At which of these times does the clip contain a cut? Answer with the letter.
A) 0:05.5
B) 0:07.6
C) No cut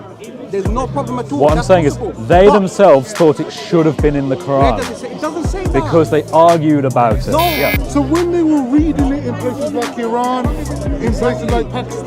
B